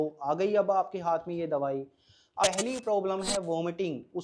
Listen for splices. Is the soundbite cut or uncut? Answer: cut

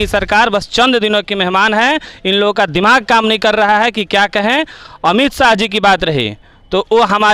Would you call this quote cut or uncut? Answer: uncut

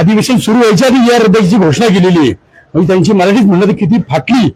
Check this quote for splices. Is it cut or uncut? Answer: uncut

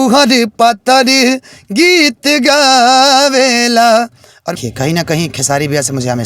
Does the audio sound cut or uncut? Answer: cut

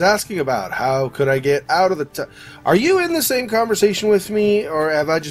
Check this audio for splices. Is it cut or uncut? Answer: uncut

